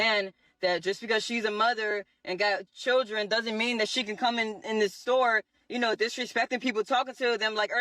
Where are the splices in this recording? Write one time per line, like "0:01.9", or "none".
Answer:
none